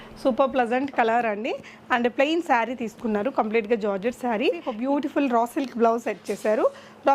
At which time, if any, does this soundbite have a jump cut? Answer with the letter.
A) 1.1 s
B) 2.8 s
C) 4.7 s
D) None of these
C